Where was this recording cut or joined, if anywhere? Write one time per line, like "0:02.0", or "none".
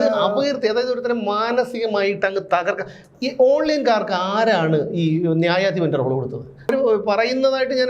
0:06.7